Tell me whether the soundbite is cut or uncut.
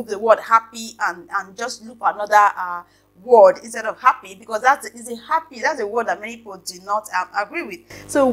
uncut